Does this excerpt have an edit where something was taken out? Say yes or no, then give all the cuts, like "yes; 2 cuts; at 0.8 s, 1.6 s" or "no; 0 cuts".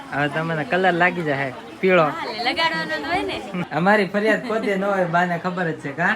yes; 1 cut; at 3.7 s